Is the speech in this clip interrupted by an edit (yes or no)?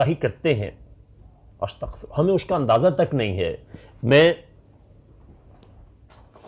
no